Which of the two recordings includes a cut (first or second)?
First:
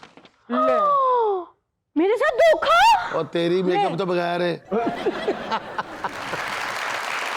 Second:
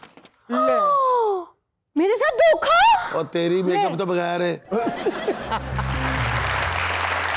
second